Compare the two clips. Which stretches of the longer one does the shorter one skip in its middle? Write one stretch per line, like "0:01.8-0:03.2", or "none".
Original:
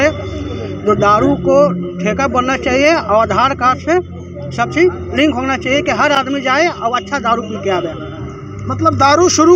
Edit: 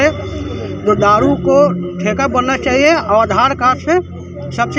none